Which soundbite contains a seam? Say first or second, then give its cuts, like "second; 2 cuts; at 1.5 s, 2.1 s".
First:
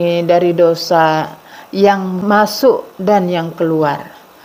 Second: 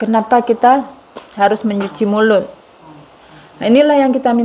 first; 1 cut; at 2.2 s